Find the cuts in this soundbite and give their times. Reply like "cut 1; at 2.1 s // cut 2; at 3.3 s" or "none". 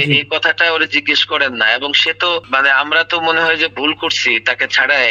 none